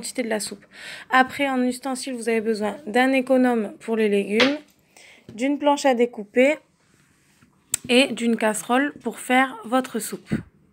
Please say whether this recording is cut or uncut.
cut